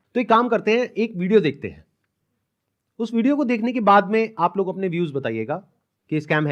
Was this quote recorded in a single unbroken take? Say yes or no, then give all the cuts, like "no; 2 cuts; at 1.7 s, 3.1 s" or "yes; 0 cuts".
yes; 0 cuts